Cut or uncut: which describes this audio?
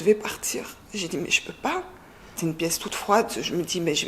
cut